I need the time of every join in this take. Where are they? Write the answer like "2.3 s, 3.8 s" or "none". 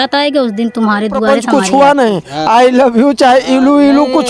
1.2 s